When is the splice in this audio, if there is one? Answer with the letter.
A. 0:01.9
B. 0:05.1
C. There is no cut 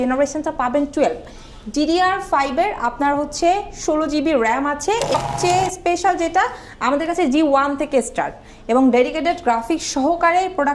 B